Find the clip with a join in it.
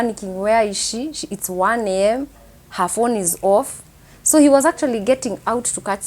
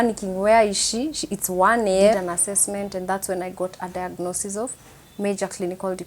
second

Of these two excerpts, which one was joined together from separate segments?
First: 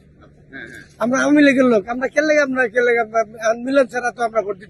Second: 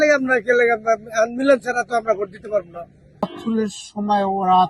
second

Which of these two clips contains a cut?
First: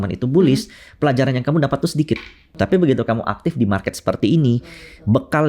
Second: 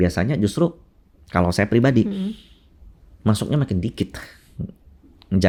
first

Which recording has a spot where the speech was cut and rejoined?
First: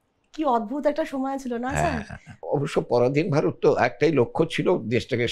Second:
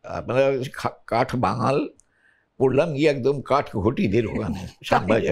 first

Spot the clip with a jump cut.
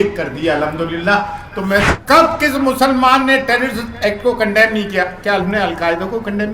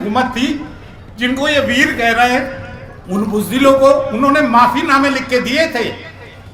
first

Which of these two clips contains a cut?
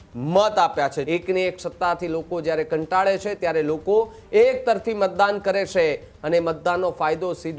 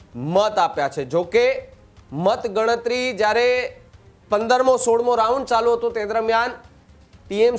first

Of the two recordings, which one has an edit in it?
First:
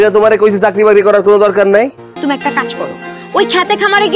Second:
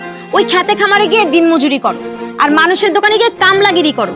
first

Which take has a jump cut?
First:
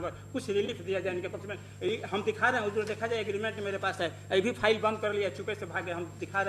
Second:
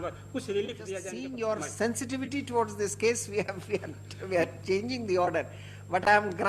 second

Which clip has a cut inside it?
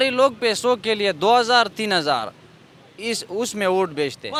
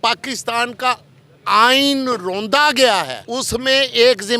second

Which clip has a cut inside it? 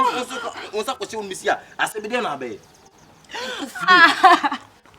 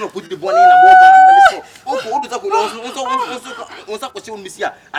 first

